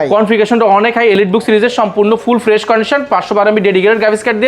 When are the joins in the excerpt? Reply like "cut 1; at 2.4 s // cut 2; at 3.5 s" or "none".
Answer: none

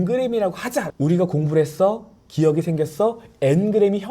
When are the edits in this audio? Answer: cut 1; at 0.9 s

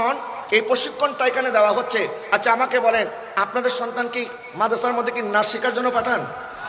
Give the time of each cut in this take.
none

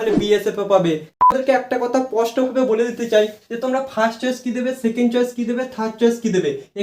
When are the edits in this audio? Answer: cut 1; at 1.2 s

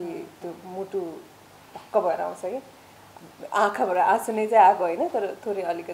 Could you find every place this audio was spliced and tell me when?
cut 1; at 3.1 s

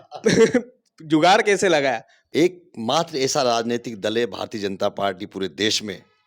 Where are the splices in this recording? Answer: cut 1; at 2.1 s

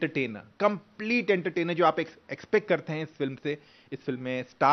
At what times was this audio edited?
none

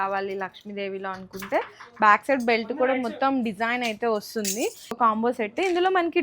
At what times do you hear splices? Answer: cut 1; at 5.0 s

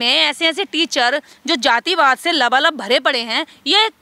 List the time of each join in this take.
none

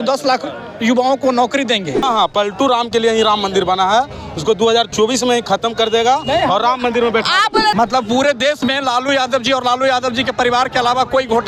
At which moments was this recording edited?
cut 1; at 2.0 s // cut 2; at 7.7 s

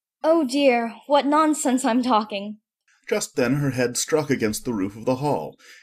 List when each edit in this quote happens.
cut 1; at 2.4 s

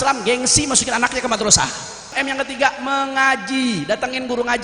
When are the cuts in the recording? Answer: cut 1; at 2.2 s

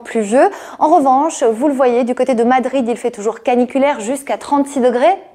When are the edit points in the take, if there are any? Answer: cut 1; at 3.4 s

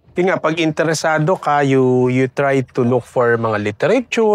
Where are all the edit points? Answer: none

